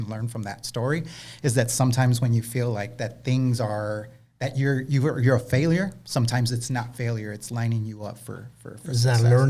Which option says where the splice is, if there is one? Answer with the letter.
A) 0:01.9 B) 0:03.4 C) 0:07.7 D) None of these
D